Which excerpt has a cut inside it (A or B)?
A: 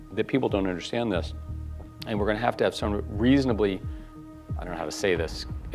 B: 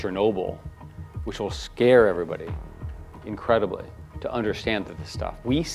A